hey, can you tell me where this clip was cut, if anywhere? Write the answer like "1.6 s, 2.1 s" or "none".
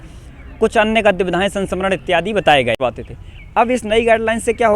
2.8 s